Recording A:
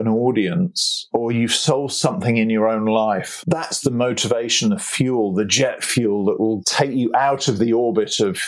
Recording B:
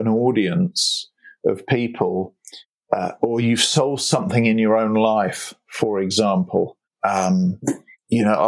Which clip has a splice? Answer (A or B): A